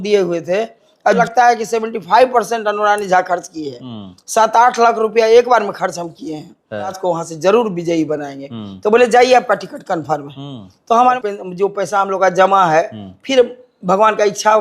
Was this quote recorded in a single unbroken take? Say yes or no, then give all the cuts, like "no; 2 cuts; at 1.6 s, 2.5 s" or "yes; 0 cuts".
no; 3 cuts; at 1.2 s, 7.0 s, 11.2 s